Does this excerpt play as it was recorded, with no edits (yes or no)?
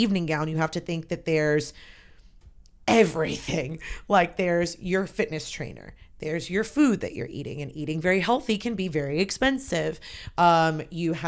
yes